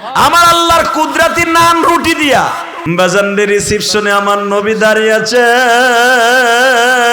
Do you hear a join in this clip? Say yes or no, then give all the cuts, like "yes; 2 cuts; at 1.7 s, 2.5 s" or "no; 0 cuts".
yes; 1 cut; at 2.7 s